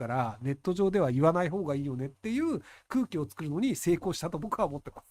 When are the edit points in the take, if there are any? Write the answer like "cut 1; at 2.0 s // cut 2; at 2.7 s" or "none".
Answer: none